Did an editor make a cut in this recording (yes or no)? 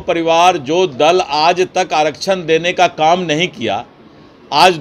no